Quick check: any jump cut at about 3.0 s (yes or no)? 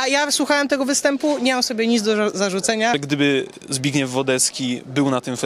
yes